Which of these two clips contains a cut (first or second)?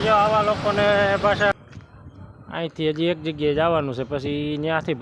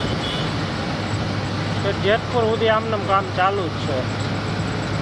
first